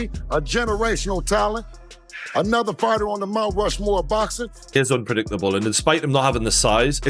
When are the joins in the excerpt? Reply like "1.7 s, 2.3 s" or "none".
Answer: 4.8 s